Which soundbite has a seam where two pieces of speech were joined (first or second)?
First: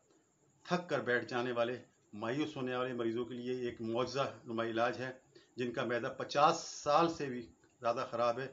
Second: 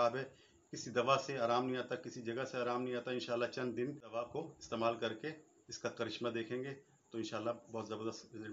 second